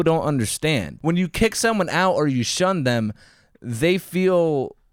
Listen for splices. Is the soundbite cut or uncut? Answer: cut